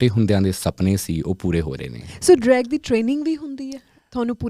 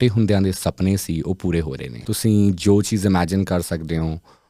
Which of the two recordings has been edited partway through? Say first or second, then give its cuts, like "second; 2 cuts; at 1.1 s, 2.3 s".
second; 1 cut; at 1.9 s